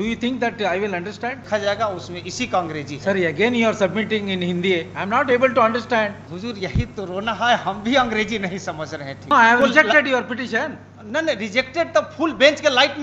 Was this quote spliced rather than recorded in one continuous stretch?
yes; 3 cuts; at 1.4 s, 6.3 s, 9.3 s

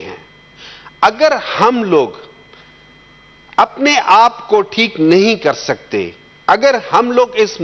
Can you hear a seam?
no; 0 cuts

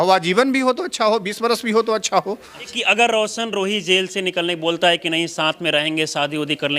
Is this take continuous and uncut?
no; 1 cut; at 2.8 s

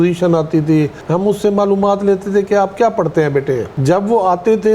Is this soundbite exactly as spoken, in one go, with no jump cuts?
no; 2 cuts; at 1.0 s, 3.7 s

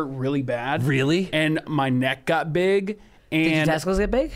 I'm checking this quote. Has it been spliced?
no; 0 cuts

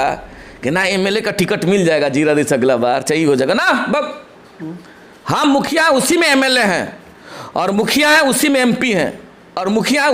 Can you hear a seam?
no; 0 cuts

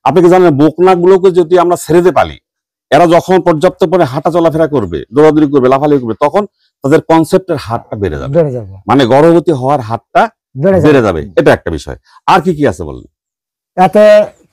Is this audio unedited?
yes; 0 cuts

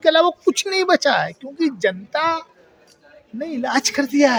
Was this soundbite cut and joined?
no; 0 cuts

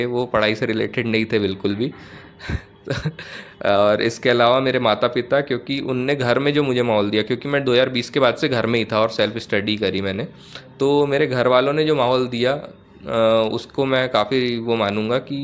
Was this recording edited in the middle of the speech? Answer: no; 0 cuts

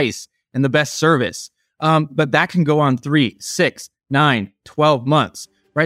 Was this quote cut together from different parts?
no; 0 cuts

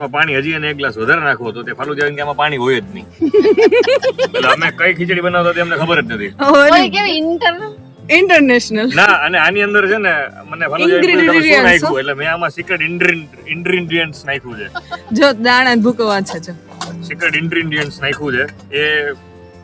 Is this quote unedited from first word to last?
yes; 0 cuts

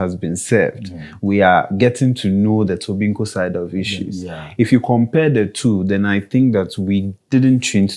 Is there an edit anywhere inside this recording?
no; 0 cuts

